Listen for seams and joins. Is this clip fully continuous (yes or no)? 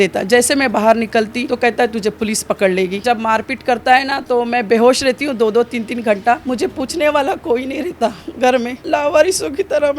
no